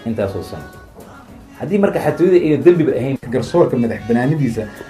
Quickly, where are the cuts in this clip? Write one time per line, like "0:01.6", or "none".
0:03.2